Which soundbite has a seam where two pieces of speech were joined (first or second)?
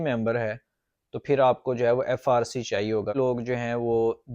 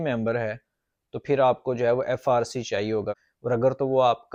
first